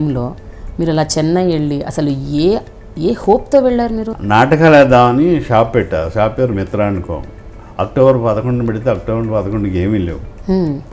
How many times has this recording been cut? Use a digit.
1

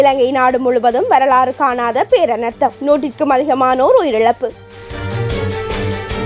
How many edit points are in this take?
1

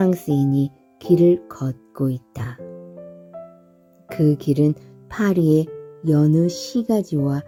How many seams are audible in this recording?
0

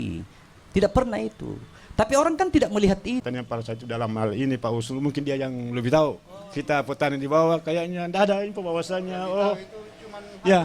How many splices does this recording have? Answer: 1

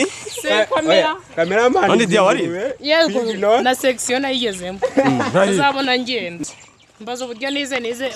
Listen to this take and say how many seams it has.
1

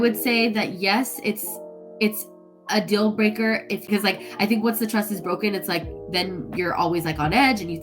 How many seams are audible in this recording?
1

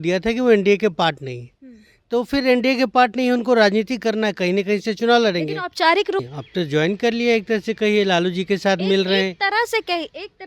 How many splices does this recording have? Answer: 1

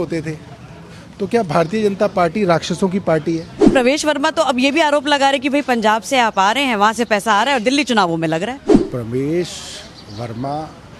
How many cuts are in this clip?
2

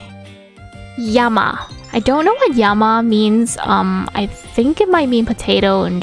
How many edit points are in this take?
0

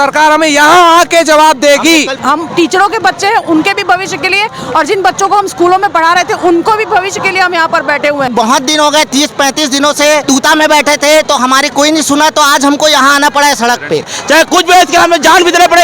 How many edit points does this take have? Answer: 4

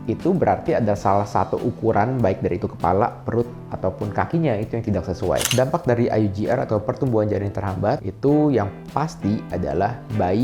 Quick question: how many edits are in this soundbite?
1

